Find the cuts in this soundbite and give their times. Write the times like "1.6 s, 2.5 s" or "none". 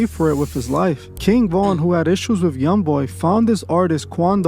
1.1 s